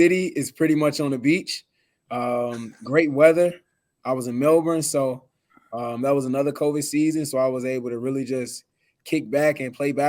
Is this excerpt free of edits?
yes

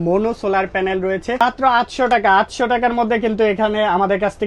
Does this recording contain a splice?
yes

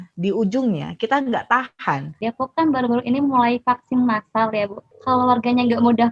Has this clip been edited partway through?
yes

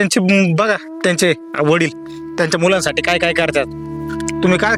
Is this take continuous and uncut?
yes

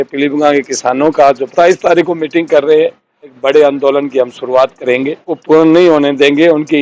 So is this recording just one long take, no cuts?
no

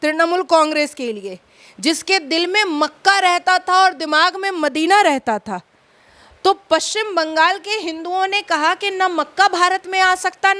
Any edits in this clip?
no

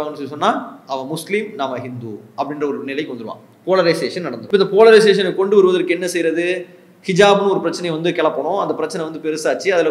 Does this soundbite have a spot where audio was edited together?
yes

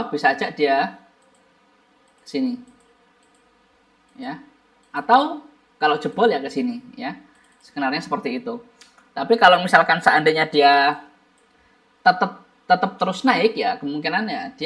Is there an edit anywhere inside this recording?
no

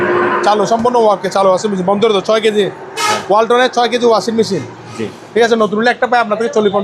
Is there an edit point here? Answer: no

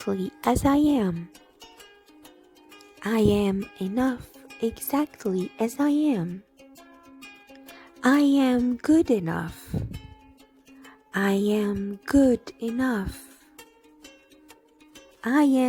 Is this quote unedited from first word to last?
yes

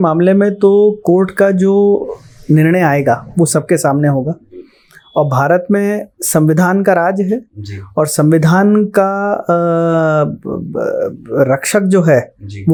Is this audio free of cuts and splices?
yes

